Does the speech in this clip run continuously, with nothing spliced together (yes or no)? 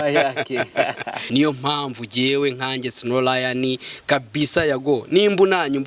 no